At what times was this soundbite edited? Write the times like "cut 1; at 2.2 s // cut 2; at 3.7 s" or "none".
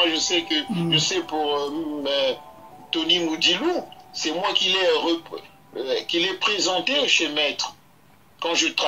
cut 1; at 2.6 s

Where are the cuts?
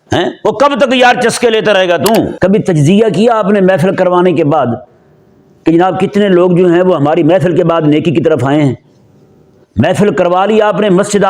cut 1; at 2.3 s

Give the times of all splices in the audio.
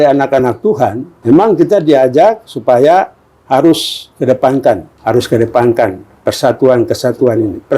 cut 1; at 1.1 s // cut 2; at 4.9 s

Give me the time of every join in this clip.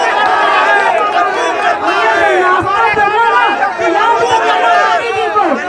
none

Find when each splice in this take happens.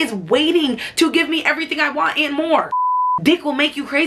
cut 1; at 2.7 s

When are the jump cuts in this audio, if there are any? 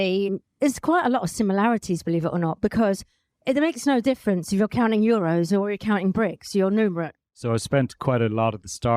cut 1; at 7.1 s

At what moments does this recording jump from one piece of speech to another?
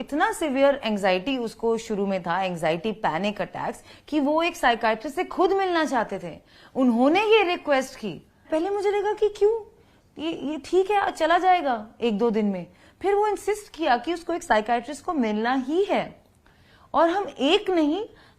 cut 1; at 8.5 s

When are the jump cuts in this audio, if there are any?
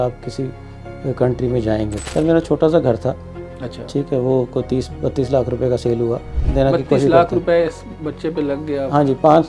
cut 1; at 2.0 s // cut 2; at 6.4 s

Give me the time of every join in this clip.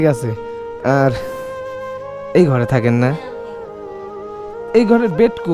cut 1; at 3.1 s // cut 2; at 4.7 s

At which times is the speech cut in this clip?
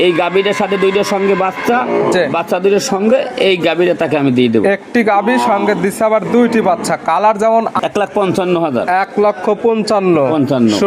cut 1; at 7.8 s

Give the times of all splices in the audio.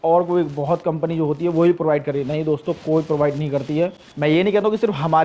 none

